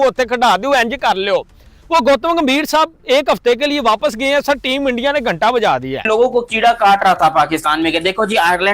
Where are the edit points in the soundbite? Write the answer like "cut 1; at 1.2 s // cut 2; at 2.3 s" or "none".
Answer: none